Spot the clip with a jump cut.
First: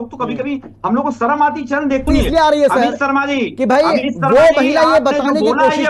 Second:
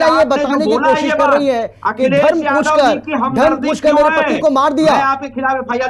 first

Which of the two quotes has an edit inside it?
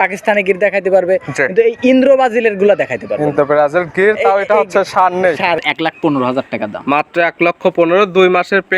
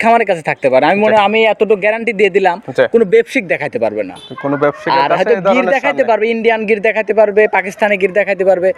first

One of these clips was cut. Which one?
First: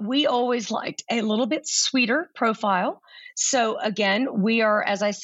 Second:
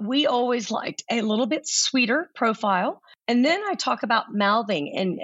second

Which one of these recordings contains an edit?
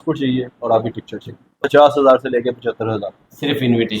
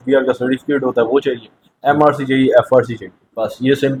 first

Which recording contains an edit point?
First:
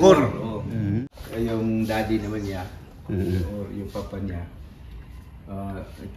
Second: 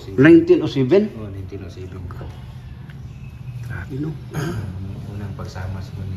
first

